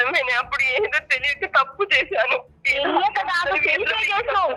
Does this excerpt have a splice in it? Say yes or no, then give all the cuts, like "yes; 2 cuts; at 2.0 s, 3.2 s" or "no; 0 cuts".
no; 0 cuts